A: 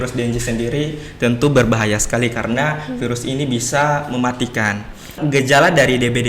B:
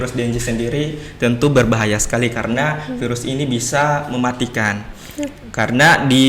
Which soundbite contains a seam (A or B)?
A